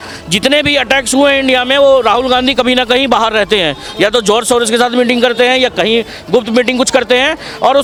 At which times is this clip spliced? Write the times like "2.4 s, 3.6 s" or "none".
none